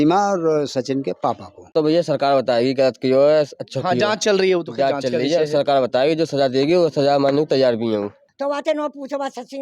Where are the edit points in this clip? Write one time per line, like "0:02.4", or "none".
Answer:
0:01.6
0:08.2